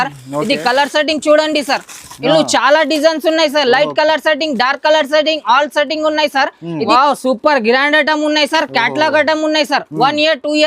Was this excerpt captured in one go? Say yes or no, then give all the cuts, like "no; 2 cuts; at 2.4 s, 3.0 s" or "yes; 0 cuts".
no; 1 cut; at 6.9 s